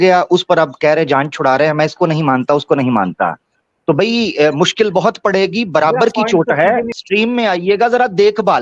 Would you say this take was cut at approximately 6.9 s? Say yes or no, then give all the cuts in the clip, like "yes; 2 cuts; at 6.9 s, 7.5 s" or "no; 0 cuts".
yes; 1 cut; at 6.9 s